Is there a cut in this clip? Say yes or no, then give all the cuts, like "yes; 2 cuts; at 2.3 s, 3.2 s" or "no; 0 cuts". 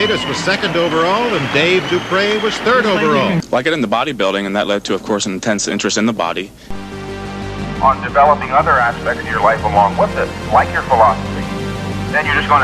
yes; 2 cuts; at 3.4 s, 6.7 s